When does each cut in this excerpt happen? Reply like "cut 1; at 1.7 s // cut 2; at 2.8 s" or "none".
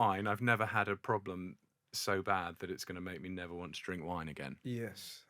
none